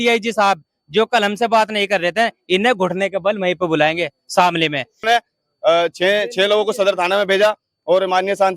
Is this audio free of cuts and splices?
no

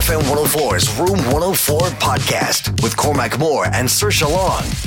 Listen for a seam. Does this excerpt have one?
no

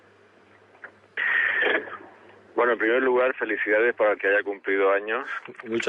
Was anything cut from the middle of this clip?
yes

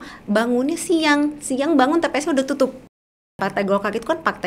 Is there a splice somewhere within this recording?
yes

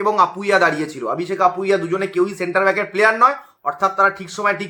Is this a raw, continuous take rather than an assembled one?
yes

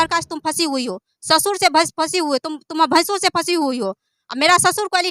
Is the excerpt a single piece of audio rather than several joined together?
yes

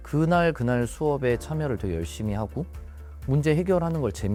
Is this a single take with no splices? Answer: yes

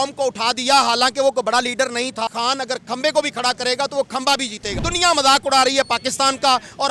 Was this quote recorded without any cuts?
no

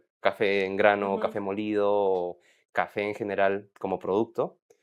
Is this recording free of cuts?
yes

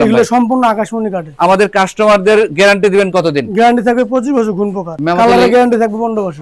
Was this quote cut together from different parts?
no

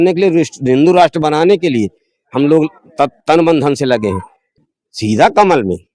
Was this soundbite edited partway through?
yes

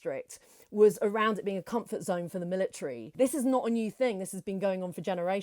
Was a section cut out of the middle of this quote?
yes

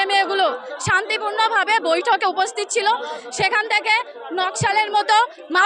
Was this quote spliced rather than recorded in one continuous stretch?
no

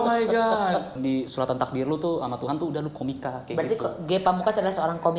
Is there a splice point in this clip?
yes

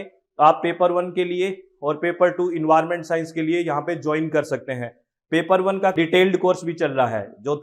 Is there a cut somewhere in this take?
no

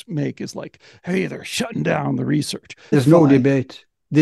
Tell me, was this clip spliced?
yes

